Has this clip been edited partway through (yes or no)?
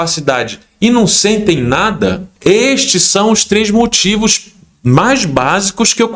yes